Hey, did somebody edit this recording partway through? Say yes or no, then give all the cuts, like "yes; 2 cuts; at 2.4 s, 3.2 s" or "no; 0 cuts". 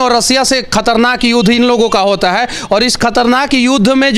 no; 0 cuts